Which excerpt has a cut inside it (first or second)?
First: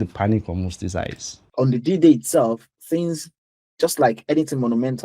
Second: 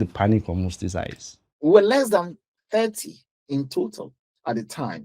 second